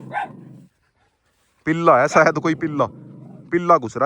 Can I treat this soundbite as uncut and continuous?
yes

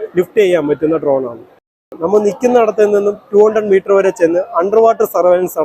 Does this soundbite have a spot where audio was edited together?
yes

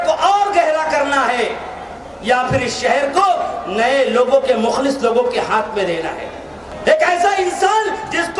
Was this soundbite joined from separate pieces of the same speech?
yes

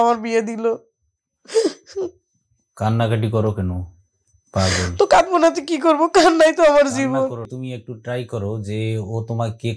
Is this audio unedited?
no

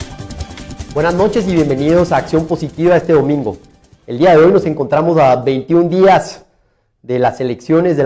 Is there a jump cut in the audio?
no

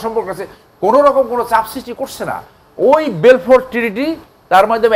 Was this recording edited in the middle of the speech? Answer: no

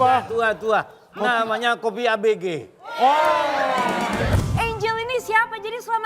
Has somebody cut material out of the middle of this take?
yes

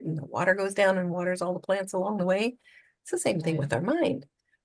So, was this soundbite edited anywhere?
no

